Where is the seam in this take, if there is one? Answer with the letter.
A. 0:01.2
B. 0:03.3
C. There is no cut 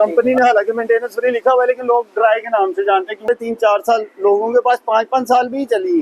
B